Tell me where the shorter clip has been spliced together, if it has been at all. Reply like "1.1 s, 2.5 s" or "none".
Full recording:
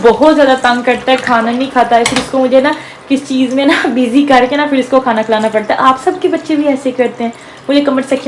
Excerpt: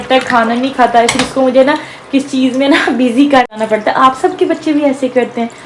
3.5 s